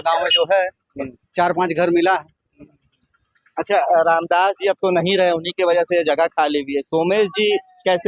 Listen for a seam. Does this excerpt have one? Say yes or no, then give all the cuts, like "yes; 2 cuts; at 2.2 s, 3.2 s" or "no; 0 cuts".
no; 0 cuts